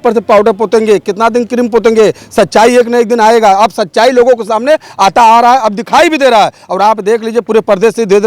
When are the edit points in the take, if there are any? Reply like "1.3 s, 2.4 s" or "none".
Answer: none